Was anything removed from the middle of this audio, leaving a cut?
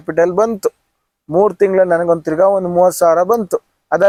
no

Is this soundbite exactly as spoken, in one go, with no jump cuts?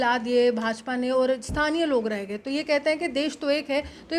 yes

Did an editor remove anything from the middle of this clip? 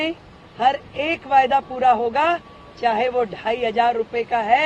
no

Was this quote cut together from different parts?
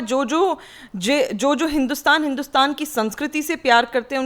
no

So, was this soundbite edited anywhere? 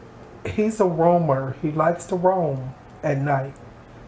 no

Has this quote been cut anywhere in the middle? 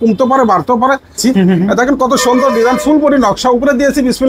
yes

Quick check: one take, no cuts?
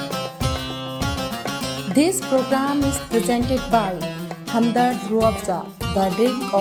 yes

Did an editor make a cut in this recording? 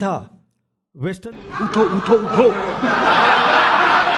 yes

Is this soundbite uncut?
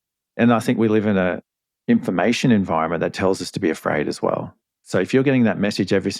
no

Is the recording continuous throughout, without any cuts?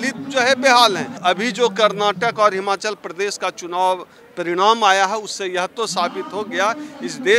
no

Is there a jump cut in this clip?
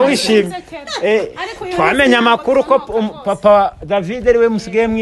no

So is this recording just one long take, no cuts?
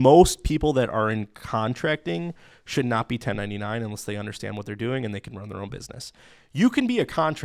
yes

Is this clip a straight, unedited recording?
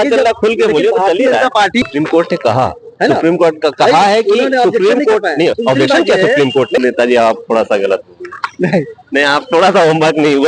no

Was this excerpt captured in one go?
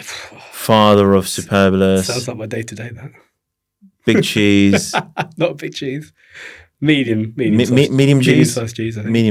yes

